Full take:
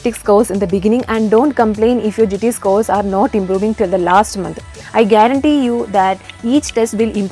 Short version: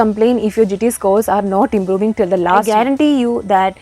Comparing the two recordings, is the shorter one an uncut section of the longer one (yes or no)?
no